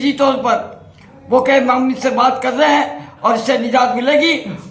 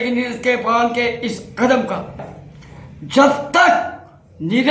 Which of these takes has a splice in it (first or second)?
second